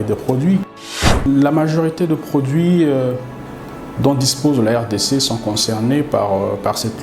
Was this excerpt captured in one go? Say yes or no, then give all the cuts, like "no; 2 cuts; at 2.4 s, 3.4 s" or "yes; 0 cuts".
no; 1 cut; at 1.3 s